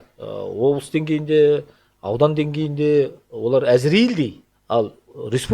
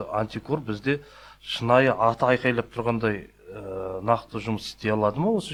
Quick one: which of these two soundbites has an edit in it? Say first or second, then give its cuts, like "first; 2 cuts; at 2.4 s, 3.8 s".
first; 1 cut; at 4.5 s